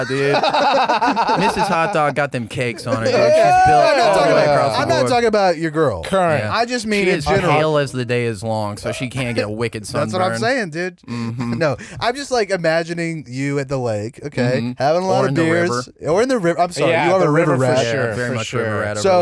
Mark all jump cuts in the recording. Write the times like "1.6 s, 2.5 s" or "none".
none